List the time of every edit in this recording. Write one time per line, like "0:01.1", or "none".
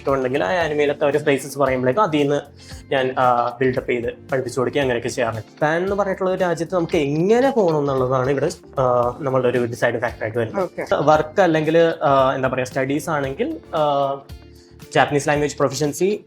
0:05.4
0:10.9